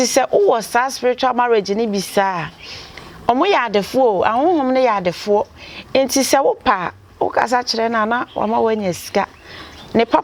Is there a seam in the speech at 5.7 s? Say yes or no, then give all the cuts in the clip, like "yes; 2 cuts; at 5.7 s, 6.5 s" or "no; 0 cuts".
no; 0 cuts